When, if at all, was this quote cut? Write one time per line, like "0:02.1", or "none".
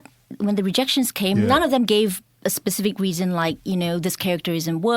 0:01.4